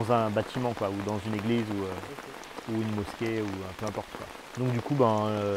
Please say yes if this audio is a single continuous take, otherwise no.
no